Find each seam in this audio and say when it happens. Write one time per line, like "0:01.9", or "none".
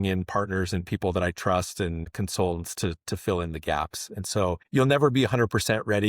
0:02.1
0:04.6